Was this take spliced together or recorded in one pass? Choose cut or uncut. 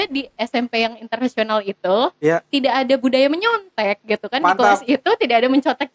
uncut